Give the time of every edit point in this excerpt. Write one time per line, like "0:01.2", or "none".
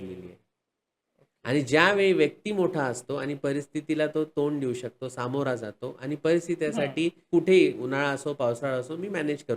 0:07.2